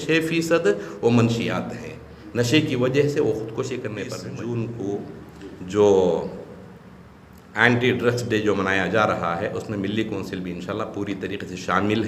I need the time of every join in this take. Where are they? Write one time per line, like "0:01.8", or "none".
0:04.2

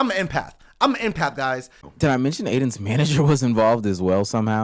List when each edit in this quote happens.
0:01.8

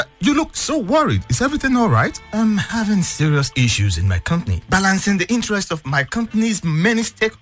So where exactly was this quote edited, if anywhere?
none

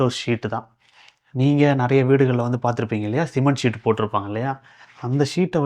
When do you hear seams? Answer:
none

